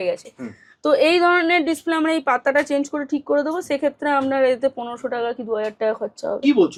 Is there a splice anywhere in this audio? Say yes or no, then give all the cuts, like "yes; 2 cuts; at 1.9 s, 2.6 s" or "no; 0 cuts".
no; 0 cuts